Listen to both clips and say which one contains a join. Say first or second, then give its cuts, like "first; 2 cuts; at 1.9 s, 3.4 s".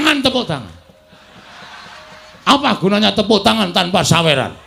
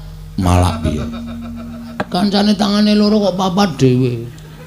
second; 1 cut; at 2.1 s